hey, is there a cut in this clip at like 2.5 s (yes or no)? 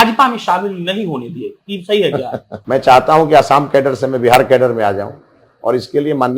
yes